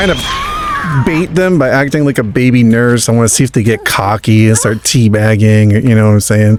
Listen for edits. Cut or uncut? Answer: uncut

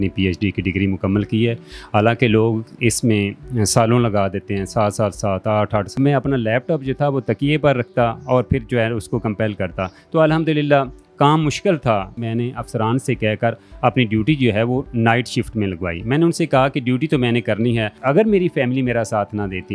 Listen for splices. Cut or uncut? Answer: cut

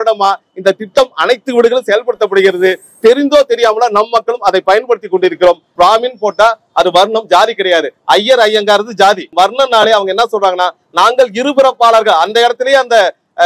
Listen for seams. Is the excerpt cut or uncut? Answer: cut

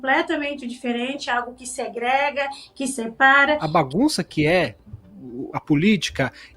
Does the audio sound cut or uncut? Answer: cut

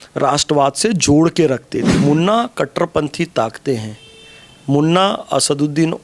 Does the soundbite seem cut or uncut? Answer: cut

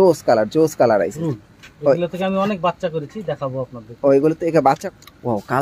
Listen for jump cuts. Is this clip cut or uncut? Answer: cut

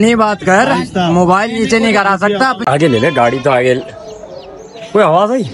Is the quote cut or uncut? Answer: cut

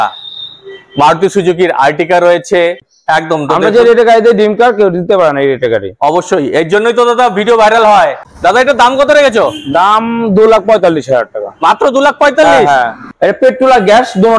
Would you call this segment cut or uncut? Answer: cut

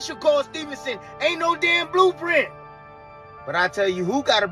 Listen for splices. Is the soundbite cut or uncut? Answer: uncut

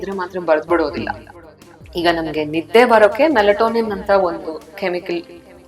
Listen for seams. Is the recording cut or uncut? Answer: cut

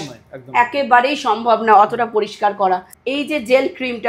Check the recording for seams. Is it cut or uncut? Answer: cut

